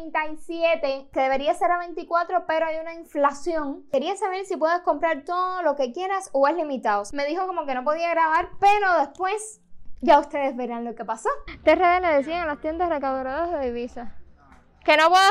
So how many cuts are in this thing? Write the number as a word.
four